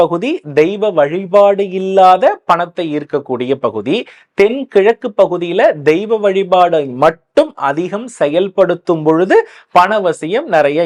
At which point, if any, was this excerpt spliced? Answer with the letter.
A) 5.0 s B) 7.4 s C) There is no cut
C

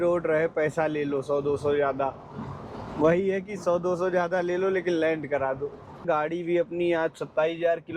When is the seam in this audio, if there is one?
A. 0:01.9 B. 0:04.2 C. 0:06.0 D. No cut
C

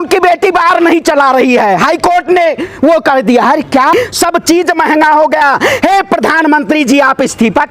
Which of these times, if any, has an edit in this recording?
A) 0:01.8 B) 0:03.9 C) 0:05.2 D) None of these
B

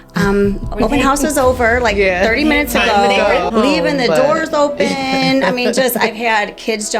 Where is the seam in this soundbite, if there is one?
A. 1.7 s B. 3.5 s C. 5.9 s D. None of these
B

